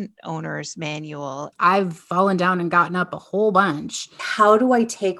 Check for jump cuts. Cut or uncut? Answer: cut